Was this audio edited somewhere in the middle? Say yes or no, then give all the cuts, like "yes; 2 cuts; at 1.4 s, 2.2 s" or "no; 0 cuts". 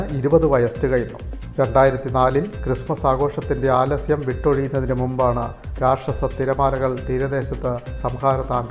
no; 0 cuts